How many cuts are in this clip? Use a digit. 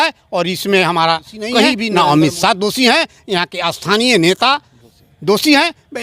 1